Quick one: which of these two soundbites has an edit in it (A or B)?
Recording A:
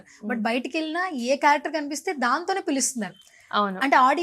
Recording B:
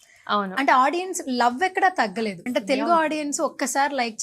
B